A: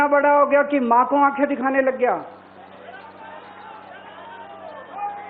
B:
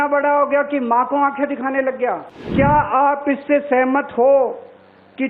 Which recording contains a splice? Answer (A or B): B